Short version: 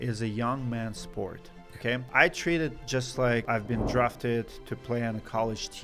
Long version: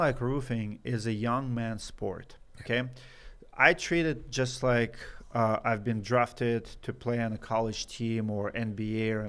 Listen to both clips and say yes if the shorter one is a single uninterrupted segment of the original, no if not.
no